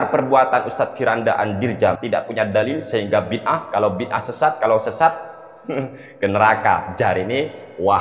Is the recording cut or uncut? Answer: cut